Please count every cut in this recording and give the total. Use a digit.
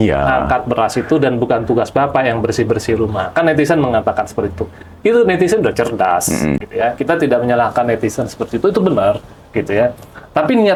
0